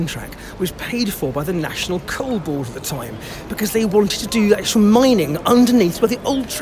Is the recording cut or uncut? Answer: uncut